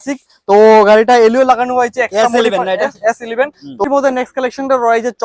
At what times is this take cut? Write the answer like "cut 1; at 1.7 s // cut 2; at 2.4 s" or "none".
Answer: cut 1; at 3.8 s